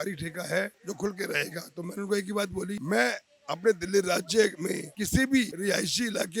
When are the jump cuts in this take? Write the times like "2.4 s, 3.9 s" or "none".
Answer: none

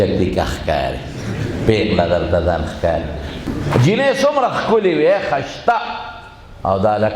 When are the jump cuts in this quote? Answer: 3.4 s

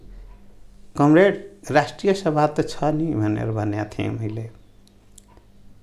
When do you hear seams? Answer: none

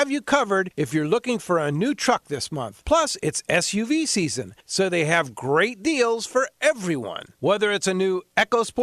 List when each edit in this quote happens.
none

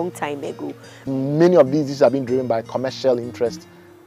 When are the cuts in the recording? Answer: 0.9 s

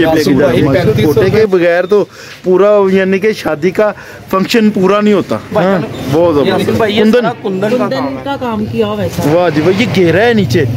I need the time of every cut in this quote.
0.9 s, 6.6 s

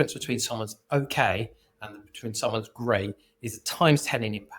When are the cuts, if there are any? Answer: none

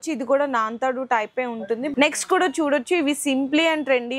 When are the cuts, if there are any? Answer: 1.9 s

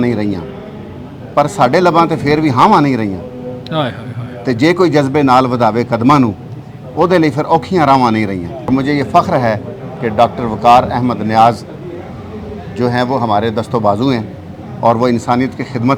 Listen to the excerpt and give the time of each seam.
8.7 s

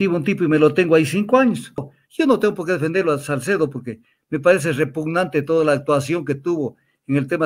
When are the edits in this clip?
2.0 s

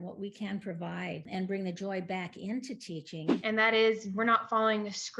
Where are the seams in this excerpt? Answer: 3.3 s

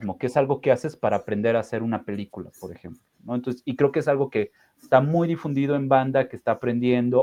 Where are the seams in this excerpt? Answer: none

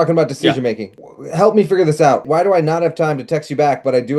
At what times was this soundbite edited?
0.9 s, 2.2 s

